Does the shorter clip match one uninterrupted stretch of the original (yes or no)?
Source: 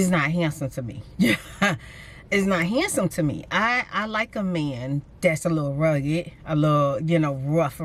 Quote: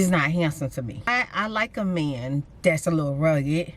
no